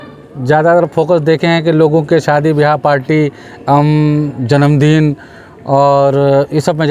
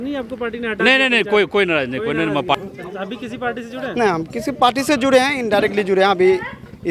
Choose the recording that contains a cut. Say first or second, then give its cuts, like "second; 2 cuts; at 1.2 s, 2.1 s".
second; 1 cut; at 2.5 s